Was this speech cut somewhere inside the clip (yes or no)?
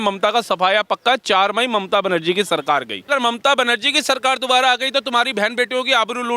yes